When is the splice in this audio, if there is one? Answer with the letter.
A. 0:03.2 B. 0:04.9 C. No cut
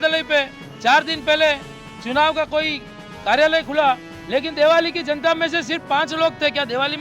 C